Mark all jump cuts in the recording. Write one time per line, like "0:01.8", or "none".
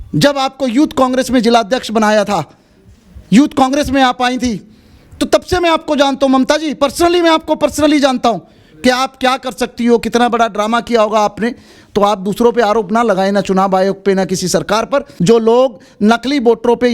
0:15.1

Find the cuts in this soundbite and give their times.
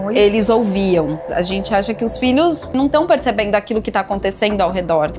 0:01.2
0:02.7

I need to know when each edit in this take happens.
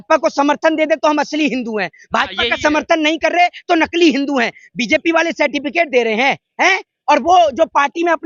none

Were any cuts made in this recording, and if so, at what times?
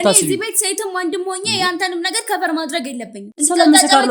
0:03.2

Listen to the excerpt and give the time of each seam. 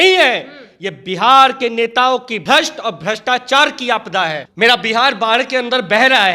0:02.4
0:04.4

